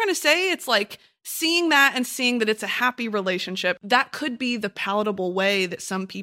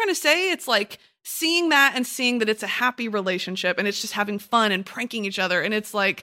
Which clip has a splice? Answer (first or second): first